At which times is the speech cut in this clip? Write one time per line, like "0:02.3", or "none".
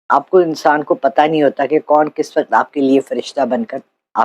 none